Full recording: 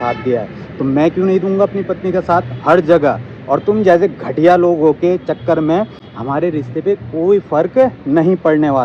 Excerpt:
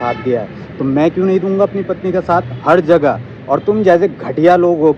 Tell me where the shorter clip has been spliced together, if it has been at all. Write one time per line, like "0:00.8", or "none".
none